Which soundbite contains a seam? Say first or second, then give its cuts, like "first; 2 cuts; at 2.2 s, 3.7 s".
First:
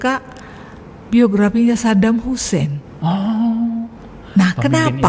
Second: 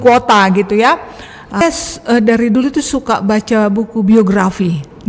second; 1 cut; at 1.6 s